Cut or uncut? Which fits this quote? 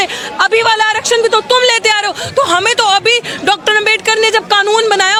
uncut